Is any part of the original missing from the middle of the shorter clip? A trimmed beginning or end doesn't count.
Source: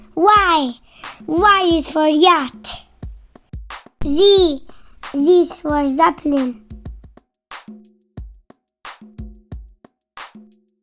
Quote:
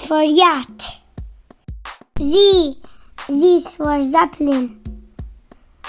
yes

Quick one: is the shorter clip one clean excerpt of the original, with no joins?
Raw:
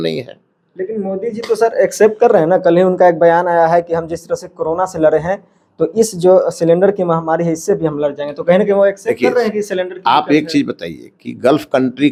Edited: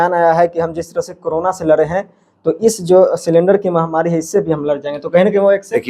yes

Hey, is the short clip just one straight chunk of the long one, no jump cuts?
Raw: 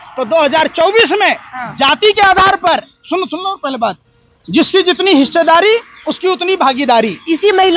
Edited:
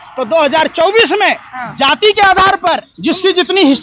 no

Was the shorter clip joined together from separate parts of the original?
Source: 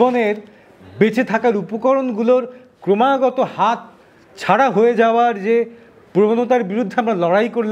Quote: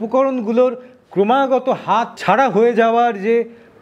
yes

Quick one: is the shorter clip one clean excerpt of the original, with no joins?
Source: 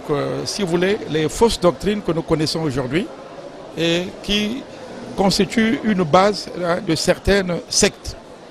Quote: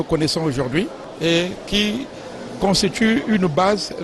no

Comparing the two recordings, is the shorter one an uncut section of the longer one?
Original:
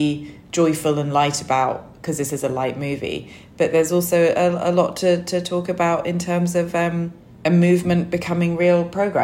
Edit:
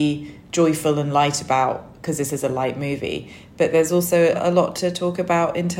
no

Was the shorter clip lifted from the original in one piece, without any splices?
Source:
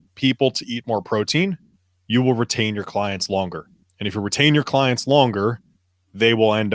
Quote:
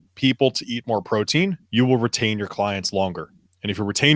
no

